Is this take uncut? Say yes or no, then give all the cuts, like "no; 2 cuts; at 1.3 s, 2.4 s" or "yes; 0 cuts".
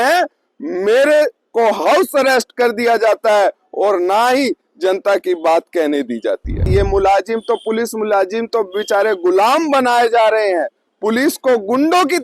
no; 1 cut; at 6.7 s